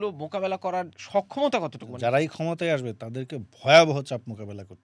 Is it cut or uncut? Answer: cut